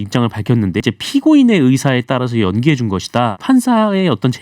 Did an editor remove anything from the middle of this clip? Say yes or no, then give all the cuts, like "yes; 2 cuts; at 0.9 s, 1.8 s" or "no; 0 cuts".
yes; 2 cuts; at 0.8 s, 3.4 s